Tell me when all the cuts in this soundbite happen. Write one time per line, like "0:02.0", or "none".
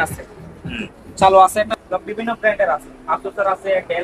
0:01.7